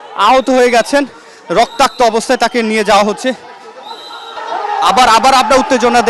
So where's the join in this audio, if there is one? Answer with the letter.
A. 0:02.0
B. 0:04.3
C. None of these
B